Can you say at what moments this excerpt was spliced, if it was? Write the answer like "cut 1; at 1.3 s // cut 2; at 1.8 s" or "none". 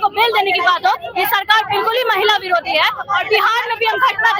none